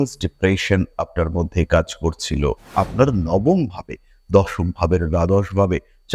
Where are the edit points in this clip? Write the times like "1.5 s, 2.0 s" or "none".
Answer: 2.6 s